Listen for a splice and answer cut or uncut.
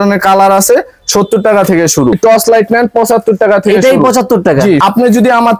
cut